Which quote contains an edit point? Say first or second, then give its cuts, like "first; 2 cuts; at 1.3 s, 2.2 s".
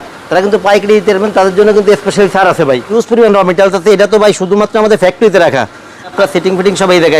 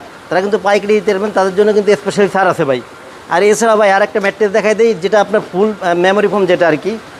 first; 2 cuts; at 3.0 s, 6.1 s